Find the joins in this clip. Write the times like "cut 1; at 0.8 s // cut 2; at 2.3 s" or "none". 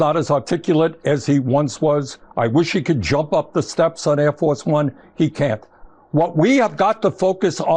cut 1; at 2.2 s